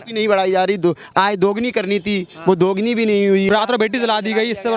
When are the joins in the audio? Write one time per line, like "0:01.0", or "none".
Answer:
0:03.5